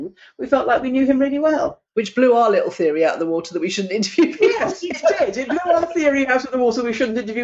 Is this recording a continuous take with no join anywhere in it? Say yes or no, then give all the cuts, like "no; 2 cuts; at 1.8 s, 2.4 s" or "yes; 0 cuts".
yes; 0 cuts